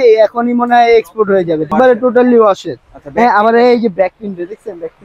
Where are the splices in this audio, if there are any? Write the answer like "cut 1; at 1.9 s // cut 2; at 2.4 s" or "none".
cut 1; at 1.7 s

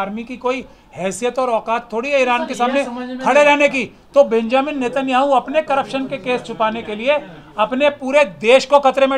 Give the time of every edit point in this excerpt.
none

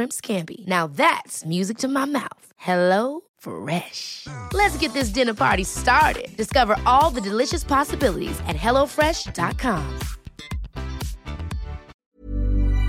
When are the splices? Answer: cut 1; at 11.8 s

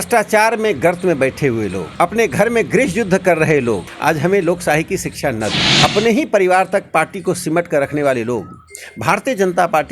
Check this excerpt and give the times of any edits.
cut 1; at 1.8 s // cut 2; at 3.9 s // cut 3; at 5.6 s

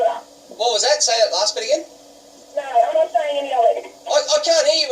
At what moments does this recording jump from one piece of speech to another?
cut 1; at 3.9 s

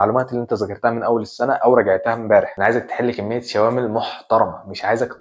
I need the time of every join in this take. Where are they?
cut 1; at 2.5 s

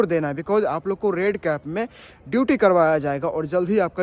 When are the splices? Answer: none

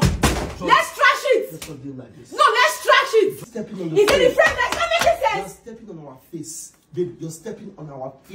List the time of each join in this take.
cut 1; at 3.5 s

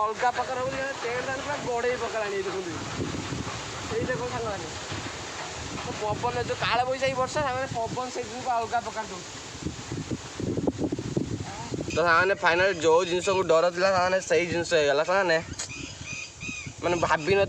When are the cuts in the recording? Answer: cut 1; at 11.9 s

